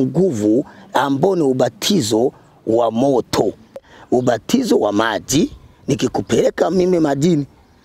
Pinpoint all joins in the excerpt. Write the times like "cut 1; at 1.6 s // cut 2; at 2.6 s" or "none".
cut 1; at 3.9 s